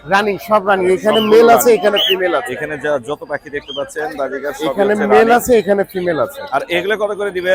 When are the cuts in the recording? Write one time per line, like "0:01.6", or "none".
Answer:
none